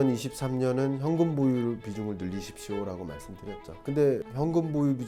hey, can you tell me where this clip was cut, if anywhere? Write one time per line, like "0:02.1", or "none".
none